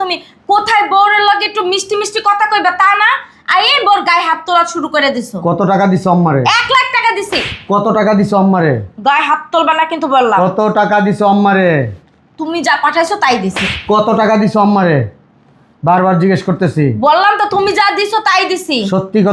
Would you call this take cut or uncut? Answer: uncut